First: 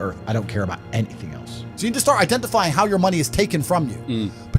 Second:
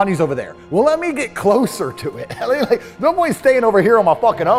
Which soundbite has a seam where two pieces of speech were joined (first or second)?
first